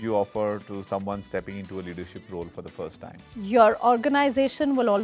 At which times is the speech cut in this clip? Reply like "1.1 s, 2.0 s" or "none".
none